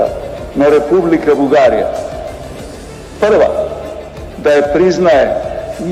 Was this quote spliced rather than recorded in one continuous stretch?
no; 0 cuts

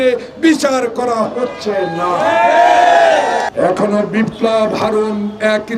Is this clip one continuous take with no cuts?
no; 1 cut; at 3.5 s

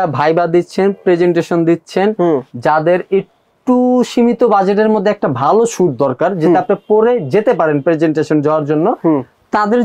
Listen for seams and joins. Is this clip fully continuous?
yes; 0 cuts

